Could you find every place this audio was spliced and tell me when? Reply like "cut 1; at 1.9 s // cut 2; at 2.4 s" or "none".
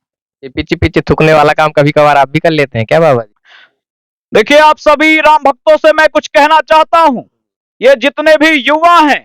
cut 1; at 3.4 s